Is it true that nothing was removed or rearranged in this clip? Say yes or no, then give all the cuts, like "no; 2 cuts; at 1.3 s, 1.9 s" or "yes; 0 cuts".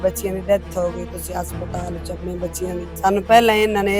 no; 1 cut; at 2.9 s